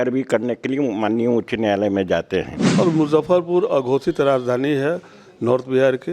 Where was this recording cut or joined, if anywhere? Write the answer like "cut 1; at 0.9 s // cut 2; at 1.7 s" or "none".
cut 1; at 2.6 s